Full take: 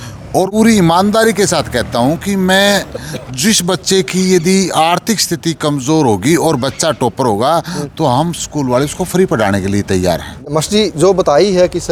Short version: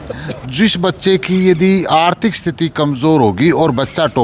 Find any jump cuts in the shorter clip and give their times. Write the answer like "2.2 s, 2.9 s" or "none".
none